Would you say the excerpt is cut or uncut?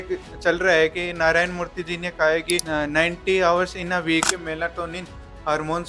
cut